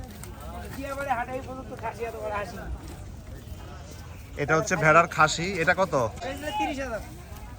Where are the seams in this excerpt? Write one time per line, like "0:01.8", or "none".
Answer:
0:06.2